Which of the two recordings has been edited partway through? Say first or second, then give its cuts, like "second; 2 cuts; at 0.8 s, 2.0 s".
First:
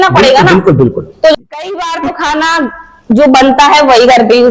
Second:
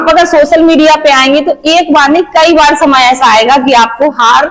first; 1 cut; at 1.3 s